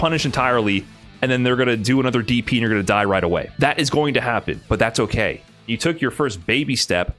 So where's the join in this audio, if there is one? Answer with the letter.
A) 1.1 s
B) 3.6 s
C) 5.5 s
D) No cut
C